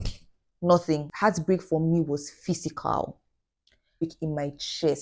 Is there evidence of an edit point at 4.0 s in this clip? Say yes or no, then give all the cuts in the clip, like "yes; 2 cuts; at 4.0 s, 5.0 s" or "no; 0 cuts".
yes; 1 cut; at 4.0 s